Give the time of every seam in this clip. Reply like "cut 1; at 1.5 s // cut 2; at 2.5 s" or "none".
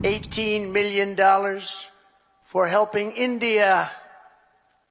none